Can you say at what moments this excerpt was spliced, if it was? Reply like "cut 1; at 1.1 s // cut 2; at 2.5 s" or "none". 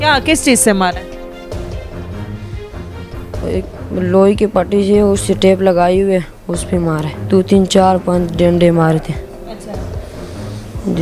cut 1; at 1.5 s // cut 2; at 2.9 s // cut 3; at 7.1 s